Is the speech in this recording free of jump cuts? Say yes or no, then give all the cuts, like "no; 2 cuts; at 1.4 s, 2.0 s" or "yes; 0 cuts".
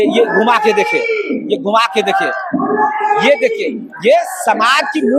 yes; 0 cuts